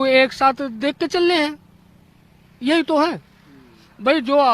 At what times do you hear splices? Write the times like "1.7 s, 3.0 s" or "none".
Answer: none